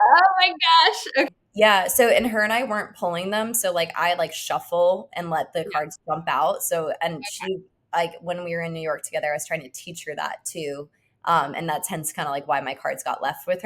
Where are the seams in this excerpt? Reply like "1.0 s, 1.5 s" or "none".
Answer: 1.3 s